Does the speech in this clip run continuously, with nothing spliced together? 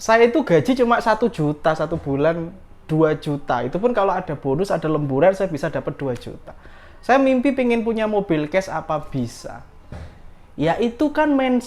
yes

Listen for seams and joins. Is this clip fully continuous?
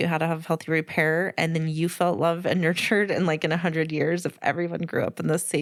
yes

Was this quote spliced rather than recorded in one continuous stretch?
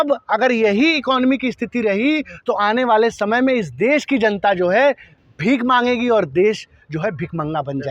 no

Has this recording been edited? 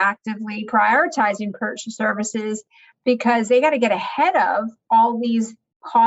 no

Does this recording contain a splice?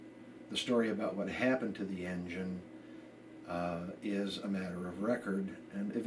no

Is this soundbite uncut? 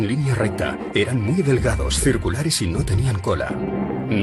yes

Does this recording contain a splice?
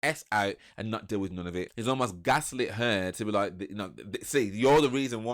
yes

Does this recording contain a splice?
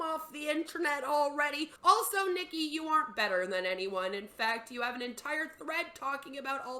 yes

